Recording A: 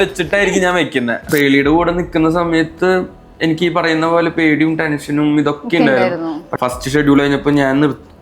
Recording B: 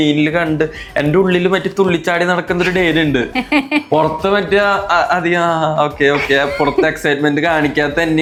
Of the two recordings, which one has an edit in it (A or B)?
A